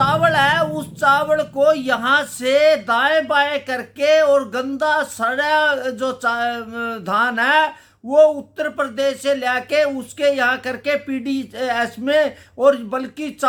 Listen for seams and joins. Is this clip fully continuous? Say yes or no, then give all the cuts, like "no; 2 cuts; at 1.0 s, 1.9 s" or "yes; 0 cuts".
yes; 0 cuts